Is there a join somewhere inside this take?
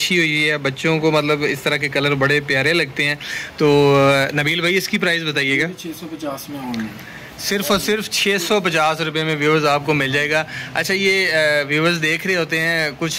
no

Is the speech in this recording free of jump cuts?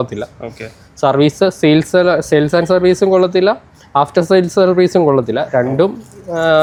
yes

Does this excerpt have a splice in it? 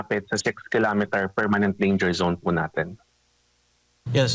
no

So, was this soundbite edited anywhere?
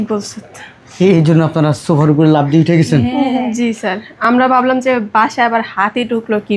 no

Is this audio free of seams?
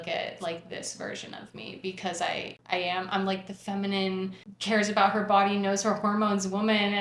no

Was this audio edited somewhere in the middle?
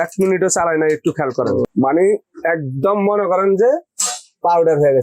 yes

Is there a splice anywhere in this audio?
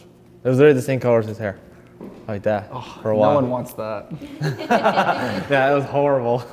no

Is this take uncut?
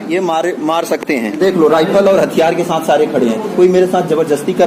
yes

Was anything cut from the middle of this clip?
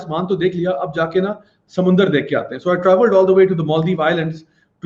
no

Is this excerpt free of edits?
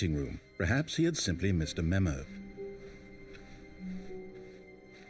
no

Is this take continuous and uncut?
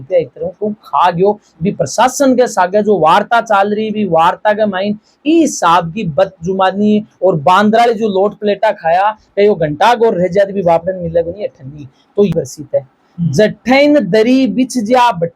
no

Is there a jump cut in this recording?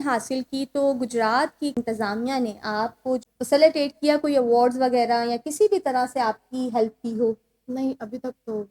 yes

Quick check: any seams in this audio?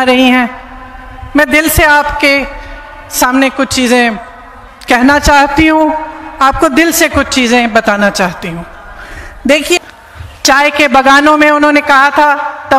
yes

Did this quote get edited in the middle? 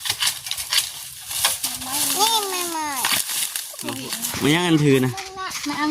yes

